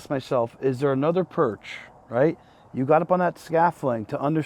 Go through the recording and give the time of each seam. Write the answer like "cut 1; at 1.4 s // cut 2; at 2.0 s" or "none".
none